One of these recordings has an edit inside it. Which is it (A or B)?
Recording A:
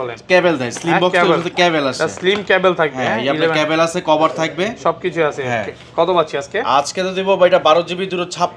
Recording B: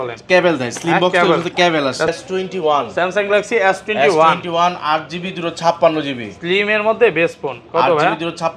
B